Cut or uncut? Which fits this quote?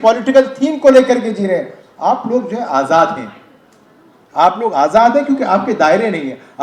uncut